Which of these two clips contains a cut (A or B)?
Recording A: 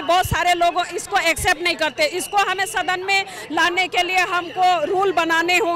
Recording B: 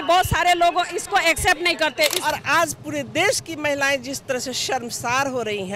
B